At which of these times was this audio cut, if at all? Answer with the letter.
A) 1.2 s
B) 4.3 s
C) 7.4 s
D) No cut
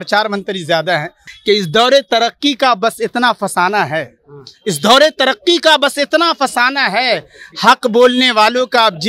A